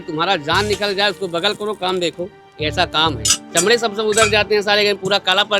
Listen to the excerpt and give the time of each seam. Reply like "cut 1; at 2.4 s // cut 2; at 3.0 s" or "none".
none